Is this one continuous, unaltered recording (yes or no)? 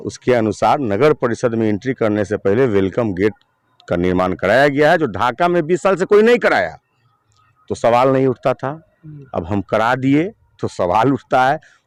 yes